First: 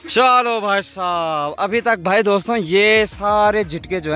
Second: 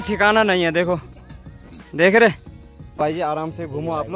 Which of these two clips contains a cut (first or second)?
second